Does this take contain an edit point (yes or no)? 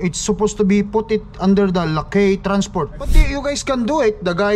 yes